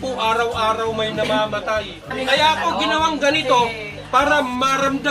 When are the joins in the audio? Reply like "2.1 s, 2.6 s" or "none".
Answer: 2.1 s